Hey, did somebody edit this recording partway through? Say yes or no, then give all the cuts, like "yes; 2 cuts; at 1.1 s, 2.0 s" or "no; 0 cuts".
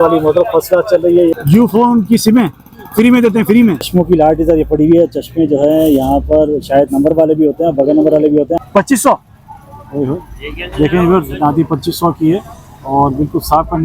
yes; 3 cuts; at 1.3 s, 3.8 s, 8.5 s